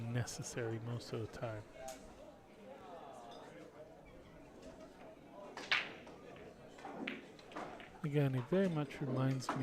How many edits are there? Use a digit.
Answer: 0